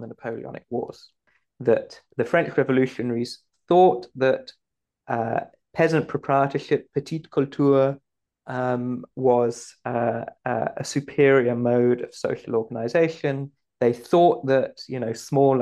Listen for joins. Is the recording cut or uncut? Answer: cut